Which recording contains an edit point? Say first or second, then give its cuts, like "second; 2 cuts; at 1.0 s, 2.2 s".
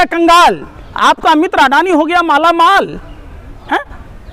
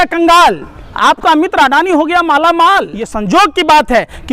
second; 1 cut; at 3.0 s